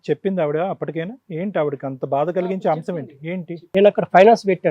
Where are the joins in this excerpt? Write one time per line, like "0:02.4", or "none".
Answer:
0:03.6